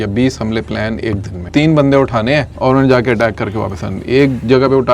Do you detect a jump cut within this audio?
yes; 2 cuts; at 1.4 s, 2.5 s

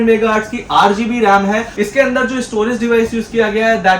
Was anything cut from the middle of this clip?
yes; 1 cut; at 1.7 s

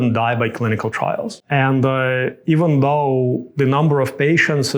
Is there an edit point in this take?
yes; 1 cut; at 1.4 s

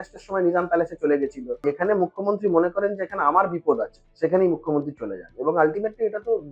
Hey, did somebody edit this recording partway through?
yes; 1 cut; at 1.6 s

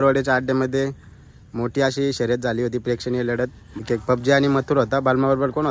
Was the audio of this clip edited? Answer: yes; 1 cut; at 3.8 s

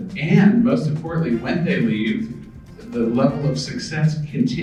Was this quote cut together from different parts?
no; 0 cuts

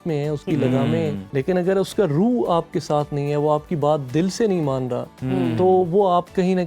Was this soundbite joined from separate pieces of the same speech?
yes; 1 cut; at 1.2 s

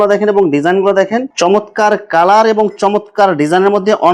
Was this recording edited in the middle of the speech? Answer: yes; 1 cut; at 1.3 s

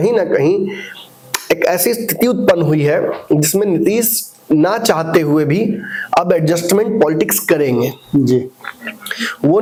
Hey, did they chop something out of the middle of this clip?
no; 0 cuts

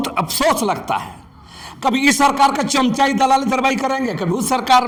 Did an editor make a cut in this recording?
no; 0 cuts

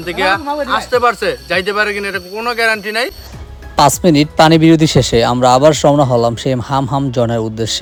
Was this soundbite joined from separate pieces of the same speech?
no; 0 cuts

